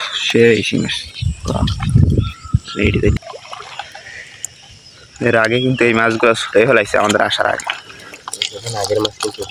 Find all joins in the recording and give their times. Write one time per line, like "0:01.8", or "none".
0:03.2